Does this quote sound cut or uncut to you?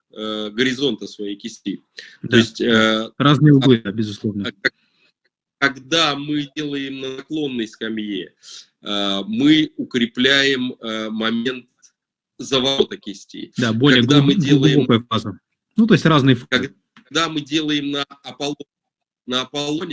uncut